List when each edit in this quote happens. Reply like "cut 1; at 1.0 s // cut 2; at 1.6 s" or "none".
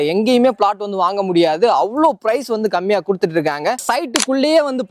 cut 1; at 3.8 s